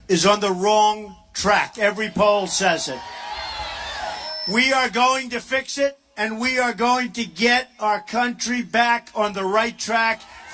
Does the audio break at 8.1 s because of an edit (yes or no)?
no